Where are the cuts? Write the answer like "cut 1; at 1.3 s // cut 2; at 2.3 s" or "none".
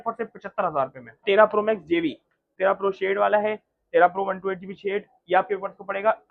cut 1; at 1.2 s // cut 2; at 2.5 s

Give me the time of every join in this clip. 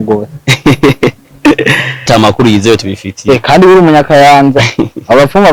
cut 1; at 2.1 s

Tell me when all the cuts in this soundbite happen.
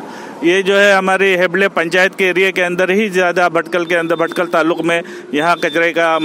none

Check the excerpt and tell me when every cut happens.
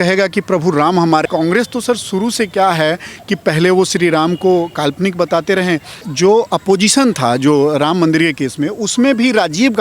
cut 1; at 1.2 s // cut 2; at 6.0 s

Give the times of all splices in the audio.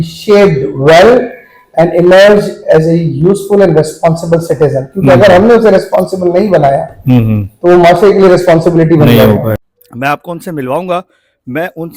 cut 1; at 9.6 s

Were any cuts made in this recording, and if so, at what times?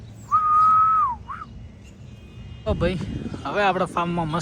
cut 1; at 2.6 s

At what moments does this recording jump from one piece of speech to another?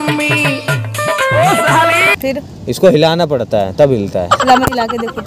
cut 1; at 2.1 s

